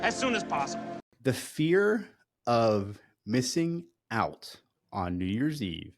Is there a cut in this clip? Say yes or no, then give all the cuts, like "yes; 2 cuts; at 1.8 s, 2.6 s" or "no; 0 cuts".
yes; 1 cut; at 1.0 s